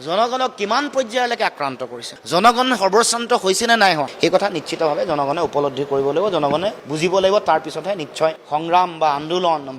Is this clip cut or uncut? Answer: uncut